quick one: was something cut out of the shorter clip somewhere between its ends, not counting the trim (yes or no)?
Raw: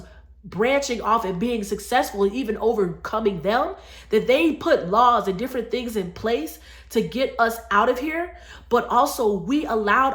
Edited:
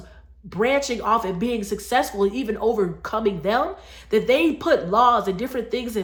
no